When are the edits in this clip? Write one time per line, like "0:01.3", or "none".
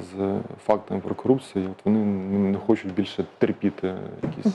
none